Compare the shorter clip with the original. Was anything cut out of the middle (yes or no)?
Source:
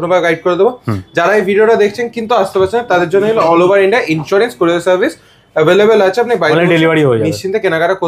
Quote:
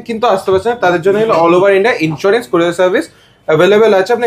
no